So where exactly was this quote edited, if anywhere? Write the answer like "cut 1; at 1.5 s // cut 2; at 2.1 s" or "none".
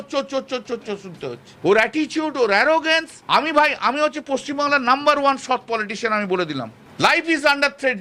cut 1; at 1.5 s // cut 2; at 3.1 s // cut 3; at 6.8 s